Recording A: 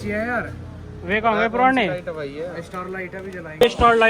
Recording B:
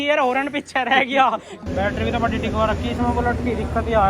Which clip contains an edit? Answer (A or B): B